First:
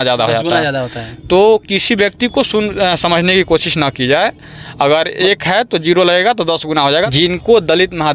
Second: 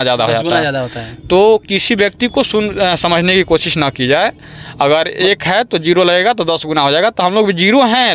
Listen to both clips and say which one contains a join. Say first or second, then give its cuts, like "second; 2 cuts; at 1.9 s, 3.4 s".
first; 1 cut; at 7.1 s